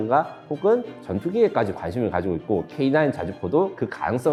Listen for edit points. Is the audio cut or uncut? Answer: uncut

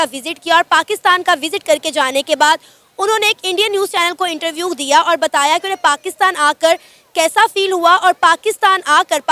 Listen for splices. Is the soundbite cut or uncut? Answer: uncut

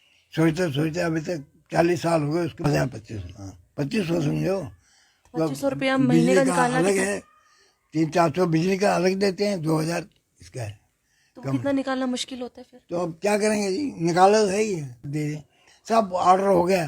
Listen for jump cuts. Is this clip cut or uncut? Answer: cut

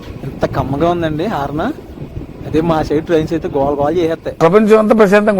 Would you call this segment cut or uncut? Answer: cut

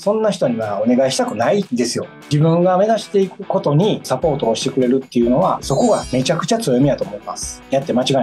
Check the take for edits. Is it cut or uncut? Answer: cut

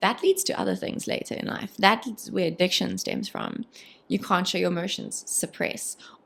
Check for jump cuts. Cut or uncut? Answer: uncut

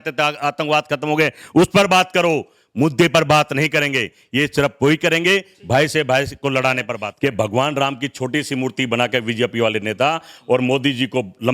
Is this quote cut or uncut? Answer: cut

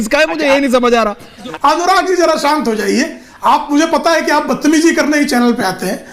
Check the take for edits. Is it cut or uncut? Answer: cut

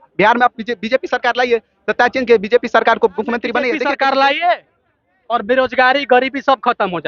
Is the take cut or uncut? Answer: cut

